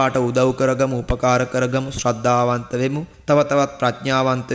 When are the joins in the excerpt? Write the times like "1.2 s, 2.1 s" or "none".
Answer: 3.1 s